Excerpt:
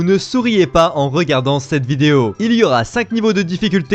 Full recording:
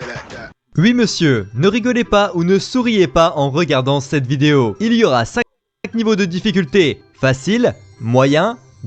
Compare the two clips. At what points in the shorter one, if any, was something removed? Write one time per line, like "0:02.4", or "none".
0:03.0